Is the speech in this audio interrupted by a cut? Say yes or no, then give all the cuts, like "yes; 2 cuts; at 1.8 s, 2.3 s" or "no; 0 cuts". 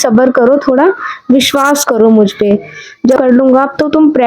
yes; 1 cut; at 3.2 s